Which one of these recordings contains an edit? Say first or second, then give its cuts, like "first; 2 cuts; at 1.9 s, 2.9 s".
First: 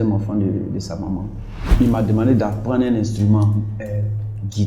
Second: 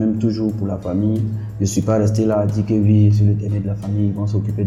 first; 1 cut; at 1.7 s